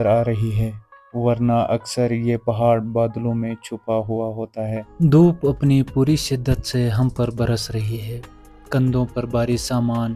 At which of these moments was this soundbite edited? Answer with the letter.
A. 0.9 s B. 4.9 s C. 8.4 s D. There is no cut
B